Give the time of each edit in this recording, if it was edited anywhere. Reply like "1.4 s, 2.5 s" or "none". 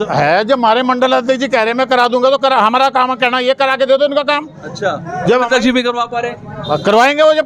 none